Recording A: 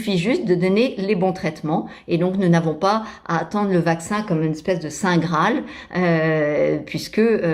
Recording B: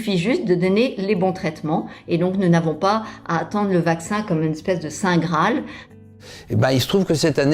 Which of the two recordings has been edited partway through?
B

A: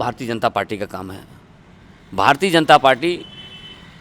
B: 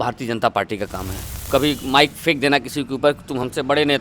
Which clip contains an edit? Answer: B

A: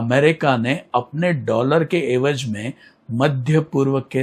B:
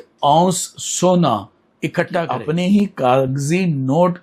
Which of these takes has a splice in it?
B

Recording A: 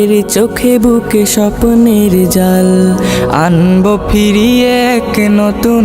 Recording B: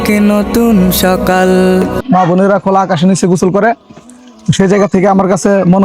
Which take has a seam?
B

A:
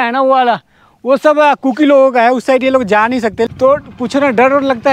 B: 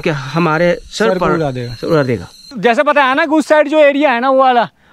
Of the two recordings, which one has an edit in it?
B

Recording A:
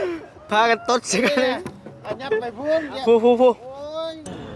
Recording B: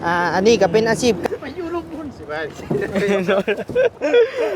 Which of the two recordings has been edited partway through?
B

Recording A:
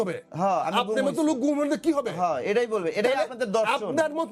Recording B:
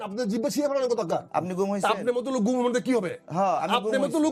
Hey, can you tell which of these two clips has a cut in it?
B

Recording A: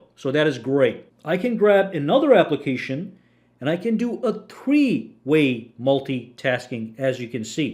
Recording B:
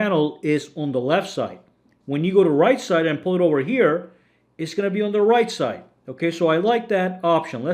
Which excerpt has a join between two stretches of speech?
A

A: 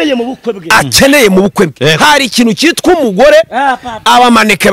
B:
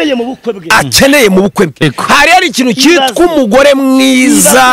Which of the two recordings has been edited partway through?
B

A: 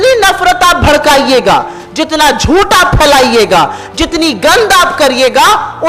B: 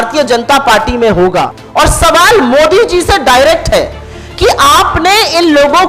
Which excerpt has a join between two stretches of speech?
B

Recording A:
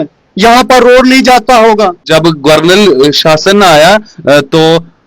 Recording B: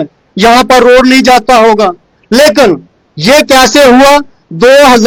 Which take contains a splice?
A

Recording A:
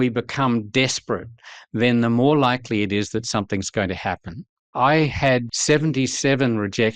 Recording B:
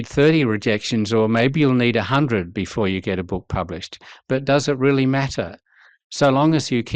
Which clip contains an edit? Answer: A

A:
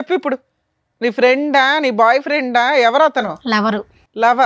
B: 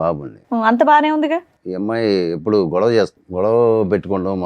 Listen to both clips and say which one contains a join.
B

